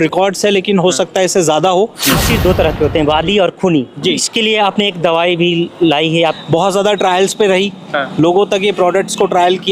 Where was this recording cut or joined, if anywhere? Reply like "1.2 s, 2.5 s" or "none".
2.2 s, 4.3 s, 6.4 s

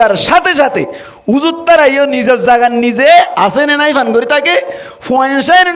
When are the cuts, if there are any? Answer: 3.3 s

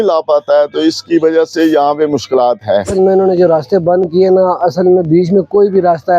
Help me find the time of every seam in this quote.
2.9 s

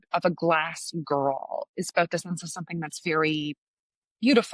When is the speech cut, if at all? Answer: none

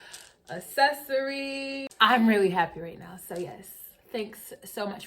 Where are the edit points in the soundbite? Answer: 1.8 s

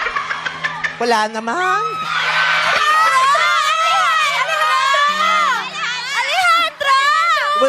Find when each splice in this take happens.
3.3 s, 4.5 s, 5.7 s

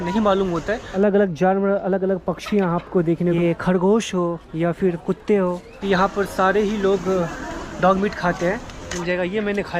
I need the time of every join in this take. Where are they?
0.9 s, 3.4 s, 5.7 s, 8.9 s

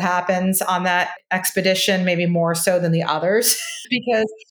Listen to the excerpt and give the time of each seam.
1.2 s

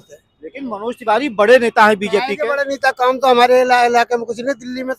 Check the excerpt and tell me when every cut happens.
none

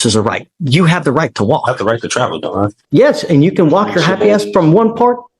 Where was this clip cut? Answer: 2.8 s

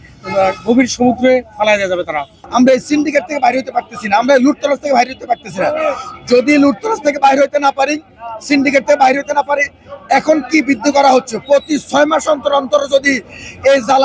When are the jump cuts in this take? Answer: 2.4 s

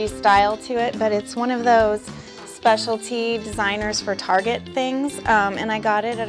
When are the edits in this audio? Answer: 4.0 s

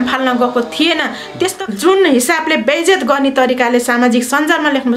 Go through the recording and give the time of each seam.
1.6 s

